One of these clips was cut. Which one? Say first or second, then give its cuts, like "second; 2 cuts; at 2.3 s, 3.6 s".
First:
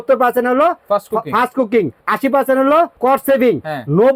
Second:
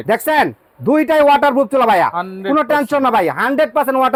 first; 2 cuts; at 2.0 s, 2.9 s